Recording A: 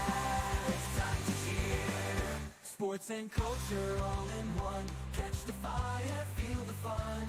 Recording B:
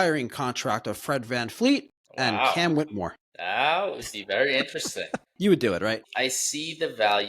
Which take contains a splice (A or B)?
B